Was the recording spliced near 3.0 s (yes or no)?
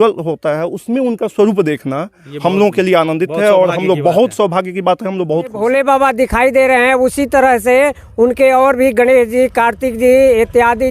no